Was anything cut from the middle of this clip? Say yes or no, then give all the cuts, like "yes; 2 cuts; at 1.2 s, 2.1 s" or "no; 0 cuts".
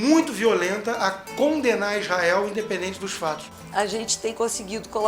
yes; 1 cut; at 3.6 s